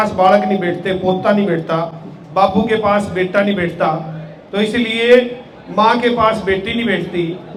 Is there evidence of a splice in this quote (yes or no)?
no